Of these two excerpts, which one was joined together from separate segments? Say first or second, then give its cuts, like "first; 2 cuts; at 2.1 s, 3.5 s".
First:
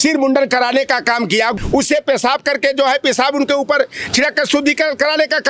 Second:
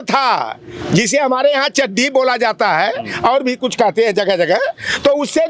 first; 1 cut; at 1.5 s